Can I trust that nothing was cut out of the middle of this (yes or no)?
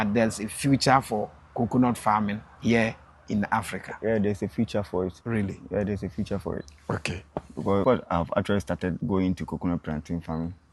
no